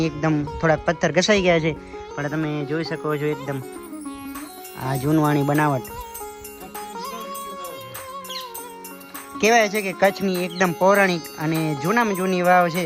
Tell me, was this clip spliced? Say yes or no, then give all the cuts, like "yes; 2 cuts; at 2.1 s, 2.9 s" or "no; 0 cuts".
yes; 2 cuts; at 5.8 s, 9.4 s